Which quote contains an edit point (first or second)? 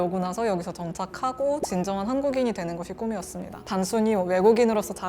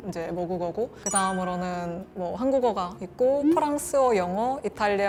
first